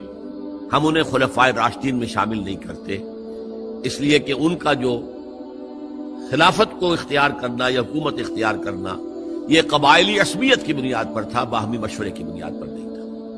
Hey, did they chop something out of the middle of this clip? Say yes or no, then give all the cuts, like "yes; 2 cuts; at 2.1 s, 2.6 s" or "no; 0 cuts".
yes; 1 cut; at 12.3 s